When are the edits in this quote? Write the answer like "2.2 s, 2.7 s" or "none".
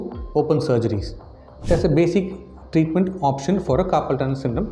1.4 s

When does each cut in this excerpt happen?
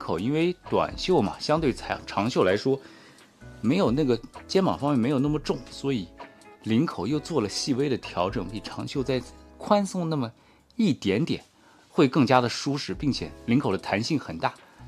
none

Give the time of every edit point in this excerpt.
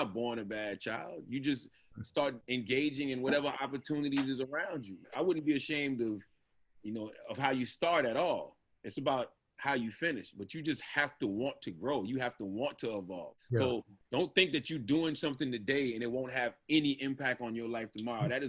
2.4 s, 5.1 s, 13.3 s

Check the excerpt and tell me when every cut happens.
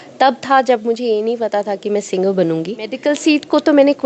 3.0 s

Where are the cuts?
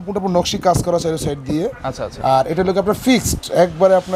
none

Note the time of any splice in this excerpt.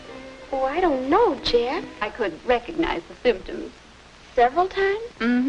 none

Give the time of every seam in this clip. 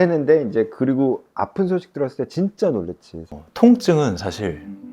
3.2 s

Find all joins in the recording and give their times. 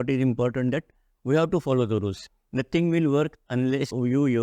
2.1 s

